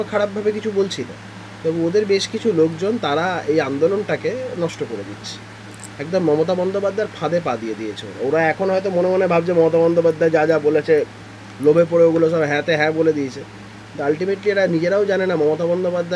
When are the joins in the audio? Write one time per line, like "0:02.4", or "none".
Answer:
none